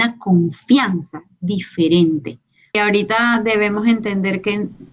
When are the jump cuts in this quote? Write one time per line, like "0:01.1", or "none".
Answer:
0:02.8